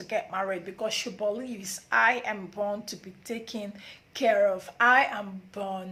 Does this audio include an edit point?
no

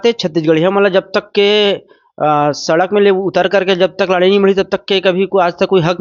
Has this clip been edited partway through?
no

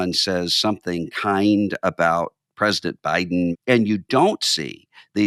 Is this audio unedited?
no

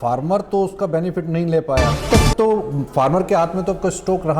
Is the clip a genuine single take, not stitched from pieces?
no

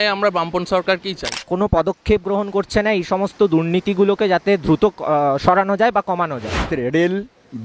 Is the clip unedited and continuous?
no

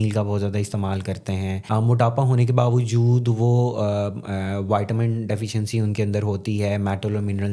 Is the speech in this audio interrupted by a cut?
yes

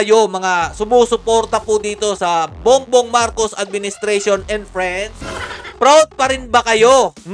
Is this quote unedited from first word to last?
no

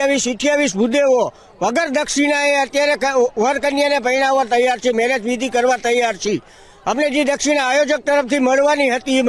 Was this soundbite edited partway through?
no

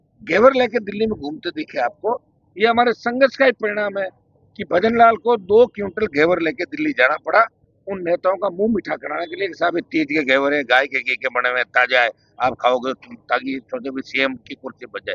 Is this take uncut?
yes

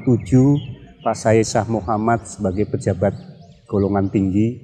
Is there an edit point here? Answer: no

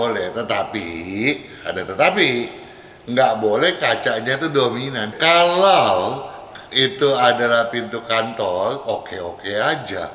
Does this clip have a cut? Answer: yes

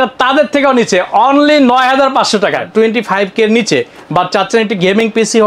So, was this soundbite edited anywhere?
yes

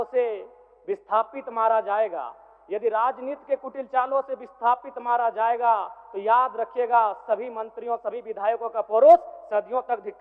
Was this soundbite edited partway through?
no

